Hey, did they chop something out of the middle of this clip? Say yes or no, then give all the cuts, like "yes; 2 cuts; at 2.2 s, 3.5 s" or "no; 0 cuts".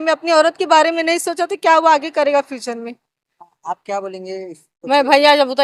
no; 0 cuts